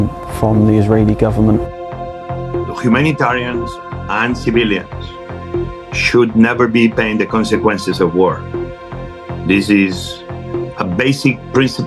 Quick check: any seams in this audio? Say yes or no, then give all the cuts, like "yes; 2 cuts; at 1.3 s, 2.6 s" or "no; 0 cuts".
no; 0 cuts